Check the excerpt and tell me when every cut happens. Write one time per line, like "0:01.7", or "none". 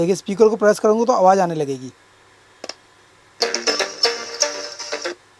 none